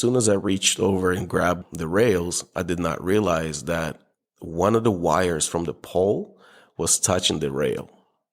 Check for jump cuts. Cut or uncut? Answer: cut